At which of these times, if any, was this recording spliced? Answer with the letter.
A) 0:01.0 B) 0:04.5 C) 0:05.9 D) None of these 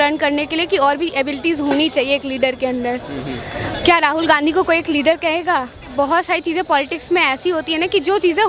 C